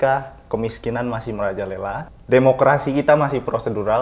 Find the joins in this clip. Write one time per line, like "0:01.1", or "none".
0:02.1